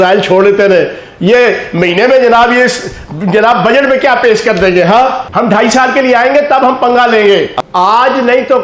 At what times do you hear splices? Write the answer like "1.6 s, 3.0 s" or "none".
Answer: 5.2 s, 7.5 s